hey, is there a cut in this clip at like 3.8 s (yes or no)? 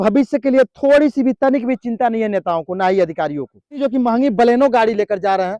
yes